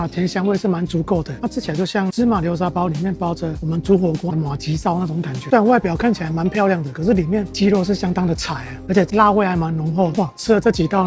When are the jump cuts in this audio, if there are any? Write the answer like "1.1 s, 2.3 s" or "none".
5.5 s, 8.7 s